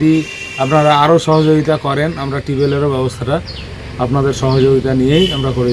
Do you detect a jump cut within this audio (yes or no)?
no